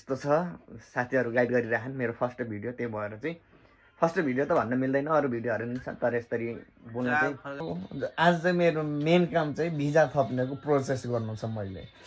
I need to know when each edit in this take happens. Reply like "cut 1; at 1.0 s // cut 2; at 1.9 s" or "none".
cut 1; at 7.6 s